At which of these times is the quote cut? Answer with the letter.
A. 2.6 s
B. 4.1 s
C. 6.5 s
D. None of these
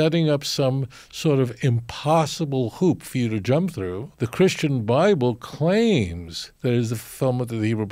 B